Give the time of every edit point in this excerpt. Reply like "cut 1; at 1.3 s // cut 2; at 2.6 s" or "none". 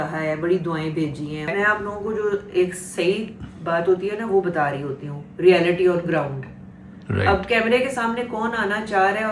cut 1; at 1.5 s